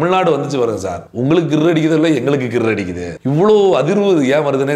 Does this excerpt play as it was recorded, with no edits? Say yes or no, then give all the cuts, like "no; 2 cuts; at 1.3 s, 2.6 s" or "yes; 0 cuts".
yes; 0 cuts